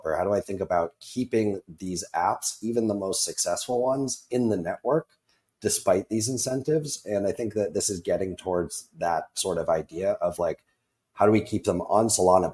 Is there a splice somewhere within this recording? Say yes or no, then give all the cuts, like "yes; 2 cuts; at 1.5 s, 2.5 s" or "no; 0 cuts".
no; 0 cuts